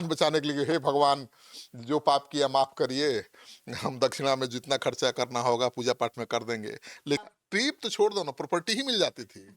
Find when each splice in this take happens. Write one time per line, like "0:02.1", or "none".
0:07.2